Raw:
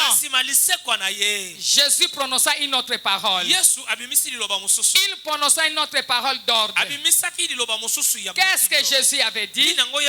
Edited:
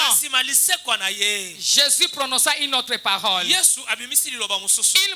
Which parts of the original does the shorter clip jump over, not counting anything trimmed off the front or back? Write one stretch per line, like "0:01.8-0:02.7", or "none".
none